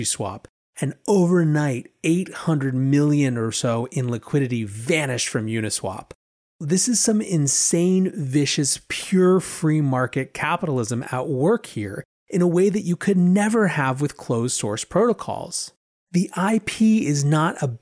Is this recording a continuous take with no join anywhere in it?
no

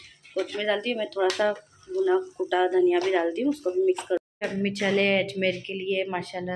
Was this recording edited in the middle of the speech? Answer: yes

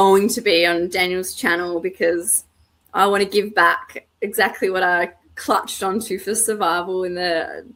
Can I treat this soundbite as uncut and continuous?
yes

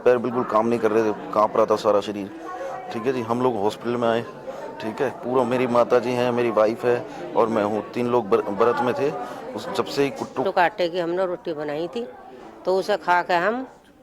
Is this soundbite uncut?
no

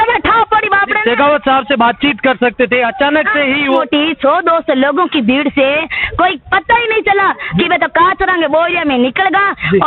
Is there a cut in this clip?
yes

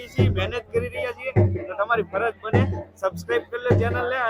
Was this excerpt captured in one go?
yes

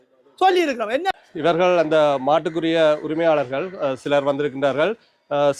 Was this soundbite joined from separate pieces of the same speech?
yes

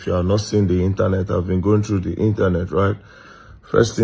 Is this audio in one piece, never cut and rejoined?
yes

